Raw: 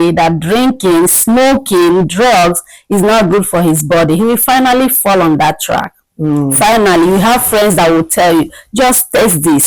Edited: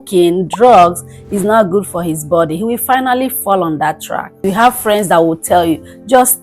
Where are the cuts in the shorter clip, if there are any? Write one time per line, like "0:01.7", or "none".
0:04.5